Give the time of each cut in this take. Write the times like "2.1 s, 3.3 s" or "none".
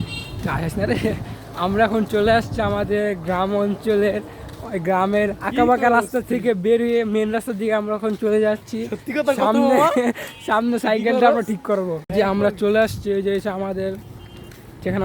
12.0 s